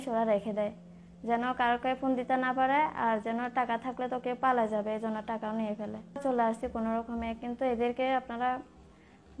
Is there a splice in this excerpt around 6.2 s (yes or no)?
yes